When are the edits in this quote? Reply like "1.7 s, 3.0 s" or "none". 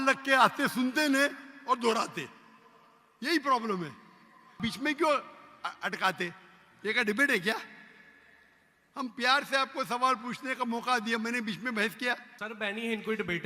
4.6 s, 12.3 s